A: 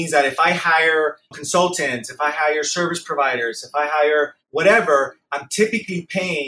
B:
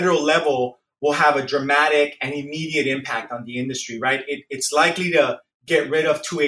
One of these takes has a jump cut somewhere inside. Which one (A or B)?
A